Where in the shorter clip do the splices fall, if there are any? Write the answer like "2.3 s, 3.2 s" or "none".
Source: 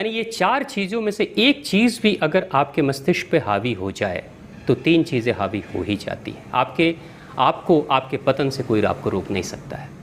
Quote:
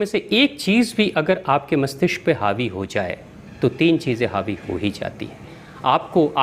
5.4 s